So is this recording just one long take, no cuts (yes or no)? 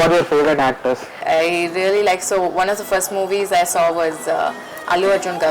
no